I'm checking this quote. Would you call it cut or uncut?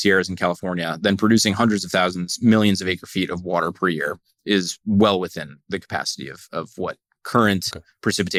uncut